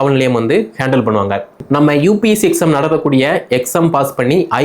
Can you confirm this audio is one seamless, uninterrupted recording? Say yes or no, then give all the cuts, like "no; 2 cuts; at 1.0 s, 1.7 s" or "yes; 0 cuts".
no; 1 cut; at 1.5 s